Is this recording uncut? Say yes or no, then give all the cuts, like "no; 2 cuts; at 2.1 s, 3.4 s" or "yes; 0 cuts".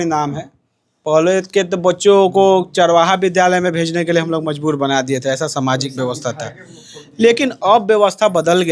yes; 0 cuts